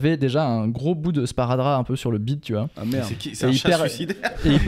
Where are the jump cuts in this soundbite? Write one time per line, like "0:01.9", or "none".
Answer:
none